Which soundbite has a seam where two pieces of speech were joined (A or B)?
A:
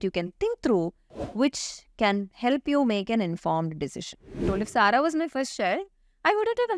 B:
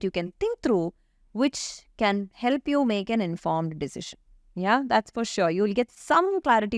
A